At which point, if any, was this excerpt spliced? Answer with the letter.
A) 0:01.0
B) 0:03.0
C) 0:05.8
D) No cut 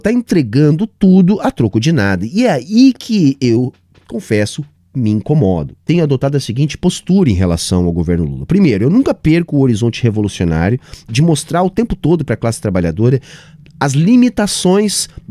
C